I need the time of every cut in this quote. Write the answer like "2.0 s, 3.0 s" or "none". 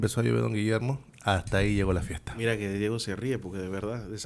none